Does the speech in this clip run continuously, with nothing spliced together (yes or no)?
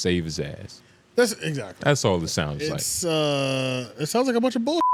yes